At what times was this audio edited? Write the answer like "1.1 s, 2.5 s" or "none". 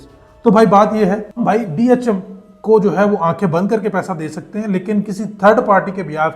1.4 s